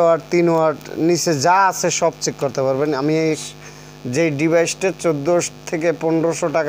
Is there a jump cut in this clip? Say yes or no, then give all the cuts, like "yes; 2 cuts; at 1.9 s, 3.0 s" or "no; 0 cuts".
yes; 1 cut; at 3.4 s